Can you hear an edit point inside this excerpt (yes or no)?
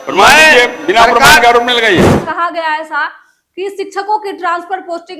yes